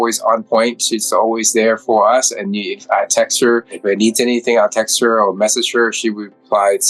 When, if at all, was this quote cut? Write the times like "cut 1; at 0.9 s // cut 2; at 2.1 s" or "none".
cut 1; at 3.7 s